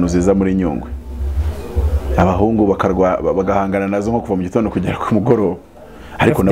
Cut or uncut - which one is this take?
uncut